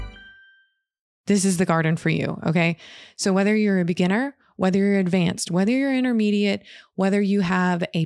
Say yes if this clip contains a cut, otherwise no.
yes